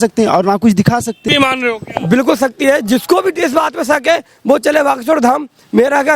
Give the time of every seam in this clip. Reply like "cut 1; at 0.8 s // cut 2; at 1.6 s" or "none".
cut 1; at 1.2 s